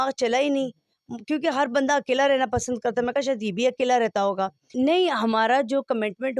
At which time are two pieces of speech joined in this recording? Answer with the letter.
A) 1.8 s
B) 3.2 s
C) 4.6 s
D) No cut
C